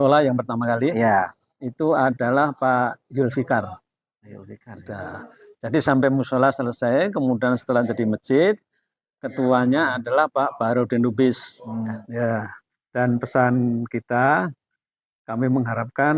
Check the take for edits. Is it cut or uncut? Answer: cut